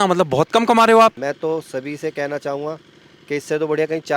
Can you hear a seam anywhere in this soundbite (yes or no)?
yes